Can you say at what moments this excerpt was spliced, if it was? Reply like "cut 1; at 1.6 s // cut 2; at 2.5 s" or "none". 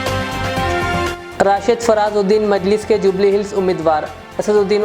cut 1; at 1.2 s